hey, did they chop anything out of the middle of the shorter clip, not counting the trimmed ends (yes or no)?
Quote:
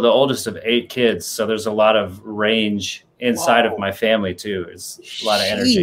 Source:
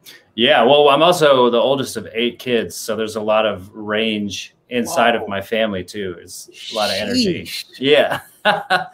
no